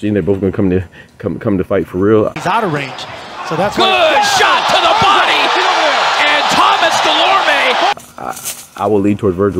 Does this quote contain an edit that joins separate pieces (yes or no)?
yes